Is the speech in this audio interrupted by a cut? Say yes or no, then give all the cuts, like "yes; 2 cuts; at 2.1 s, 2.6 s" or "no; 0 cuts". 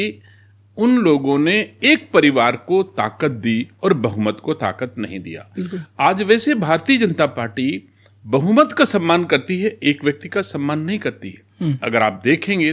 no; 0 cuts